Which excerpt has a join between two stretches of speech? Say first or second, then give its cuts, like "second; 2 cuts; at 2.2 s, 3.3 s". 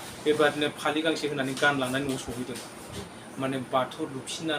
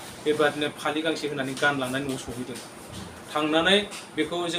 first; 1 cut; at 3.1 s